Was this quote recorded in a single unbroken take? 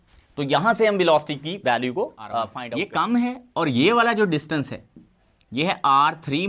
no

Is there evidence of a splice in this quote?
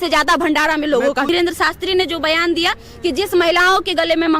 yes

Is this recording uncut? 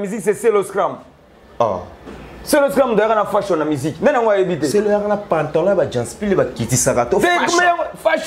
yes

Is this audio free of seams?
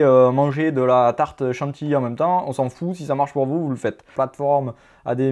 no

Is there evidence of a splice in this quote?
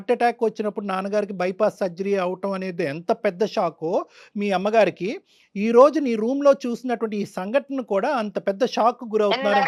no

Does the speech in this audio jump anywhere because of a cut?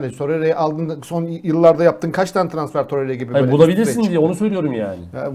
no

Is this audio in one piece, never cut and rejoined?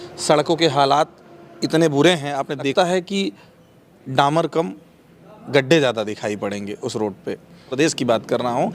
no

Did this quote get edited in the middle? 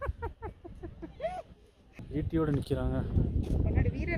yes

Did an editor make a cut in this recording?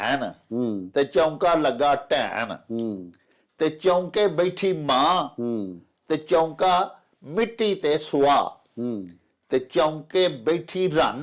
no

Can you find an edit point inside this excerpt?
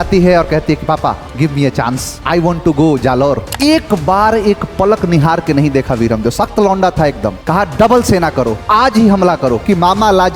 yes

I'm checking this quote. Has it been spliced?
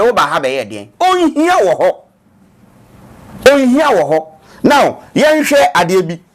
no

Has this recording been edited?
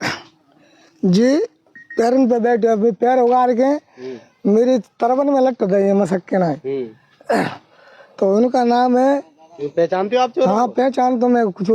no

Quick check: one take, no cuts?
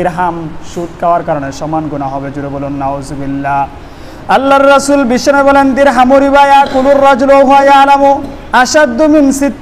yes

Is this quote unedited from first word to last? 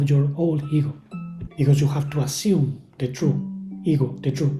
no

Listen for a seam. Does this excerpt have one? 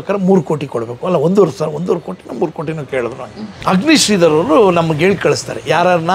yes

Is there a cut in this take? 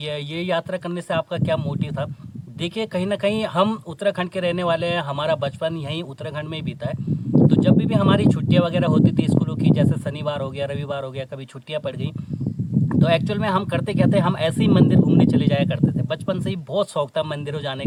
no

